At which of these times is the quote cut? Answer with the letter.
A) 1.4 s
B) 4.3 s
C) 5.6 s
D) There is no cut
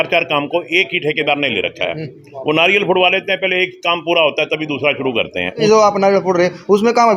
C